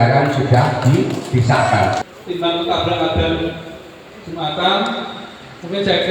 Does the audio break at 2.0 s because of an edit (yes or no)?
yes